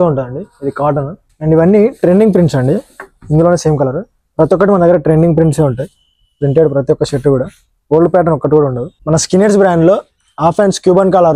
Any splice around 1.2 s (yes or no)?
yes